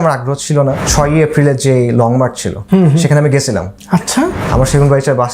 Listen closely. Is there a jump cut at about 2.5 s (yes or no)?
yes